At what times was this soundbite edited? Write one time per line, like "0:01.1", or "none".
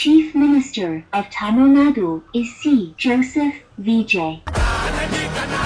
none